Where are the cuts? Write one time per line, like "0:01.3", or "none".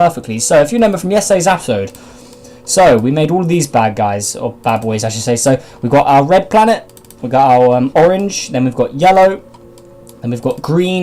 0:01.3